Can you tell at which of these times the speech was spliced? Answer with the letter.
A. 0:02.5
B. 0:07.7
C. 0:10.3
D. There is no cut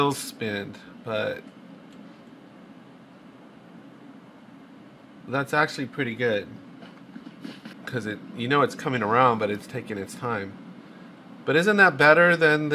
B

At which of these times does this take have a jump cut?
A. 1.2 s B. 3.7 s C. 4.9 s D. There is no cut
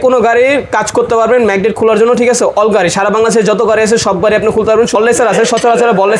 C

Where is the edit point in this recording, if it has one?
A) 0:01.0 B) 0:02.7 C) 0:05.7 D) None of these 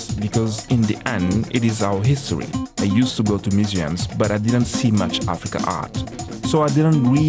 B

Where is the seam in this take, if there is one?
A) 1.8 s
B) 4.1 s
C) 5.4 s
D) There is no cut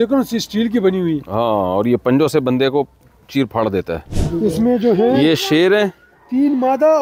B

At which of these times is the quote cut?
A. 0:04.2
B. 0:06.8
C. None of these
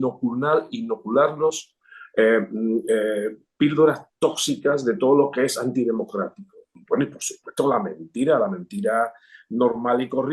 B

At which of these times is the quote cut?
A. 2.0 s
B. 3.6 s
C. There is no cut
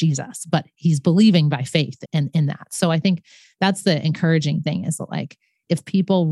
A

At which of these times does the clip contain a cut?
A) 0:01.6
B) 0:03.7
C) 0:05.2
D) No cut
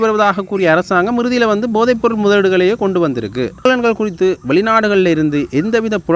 B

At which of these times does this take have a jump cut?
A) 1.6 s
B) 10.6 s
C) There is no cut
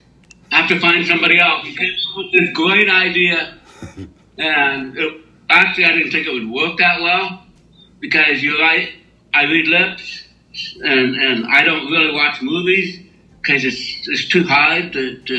A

